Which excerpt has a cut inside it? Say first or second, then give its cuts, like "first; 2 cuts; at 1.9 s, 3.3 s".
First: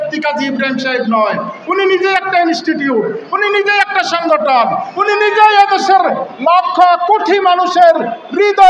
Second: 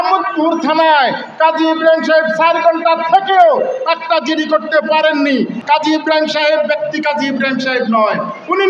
second; 1 cut; at 5.6 s